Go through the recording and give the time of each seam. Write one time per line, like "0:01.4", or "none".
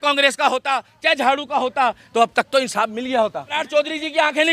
0:03.6